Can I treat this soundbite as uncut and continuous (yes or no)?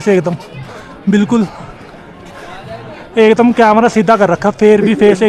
yes